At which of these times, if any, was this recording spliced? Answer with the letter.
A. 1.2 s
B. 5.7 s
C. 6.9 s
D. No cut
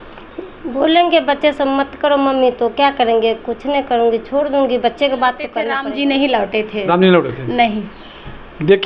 B